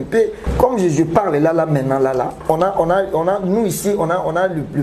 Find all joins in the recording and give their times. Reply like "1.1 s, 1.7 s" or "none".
none